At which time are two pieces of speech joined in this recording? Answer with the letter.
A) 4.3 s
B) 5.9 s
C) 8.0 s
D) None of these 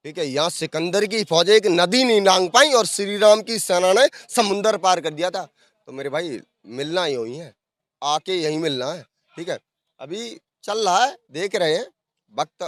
D